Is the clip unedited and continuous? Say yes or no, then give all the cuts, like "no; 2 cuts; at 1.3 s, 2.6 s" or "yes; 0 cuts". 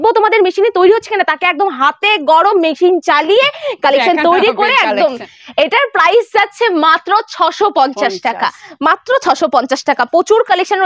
yes; 0 cuts